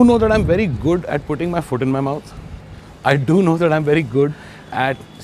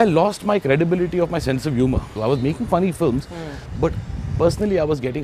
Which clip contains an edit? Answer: second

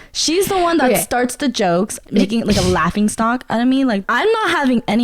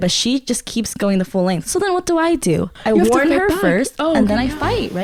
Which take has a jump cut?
first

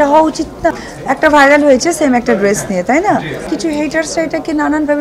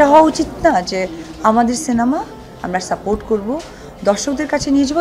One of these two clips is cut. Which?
first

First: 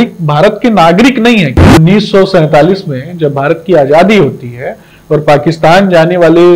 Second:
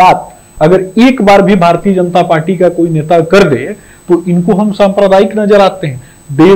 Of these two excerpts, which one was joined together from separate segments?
first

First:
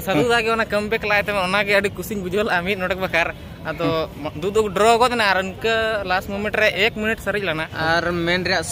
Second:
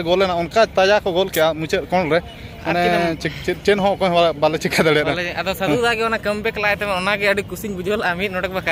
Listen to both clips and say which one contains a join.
first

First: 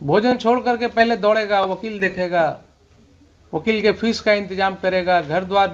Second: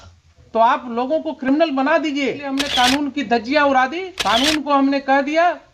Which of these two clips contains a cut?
second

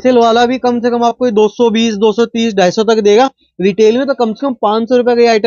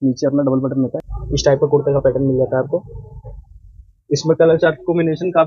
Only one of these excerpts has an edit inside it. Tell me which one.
second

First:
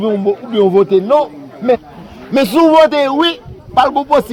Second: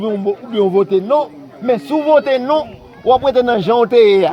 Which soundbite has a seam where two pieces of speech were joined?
first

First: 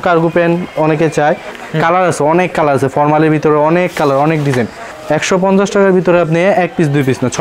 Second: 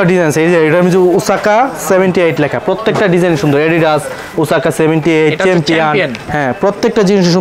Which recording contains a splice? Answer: first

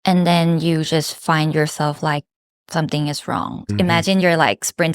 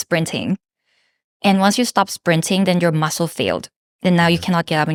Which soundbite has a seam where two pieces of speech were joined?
first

